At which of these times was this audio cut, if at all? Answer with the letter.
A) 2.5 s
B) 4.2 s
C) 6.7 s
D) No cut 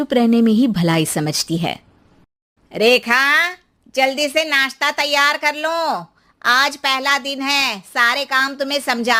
D